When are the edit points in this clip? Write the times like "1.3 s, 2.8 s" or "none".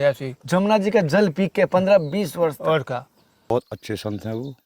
3.5 s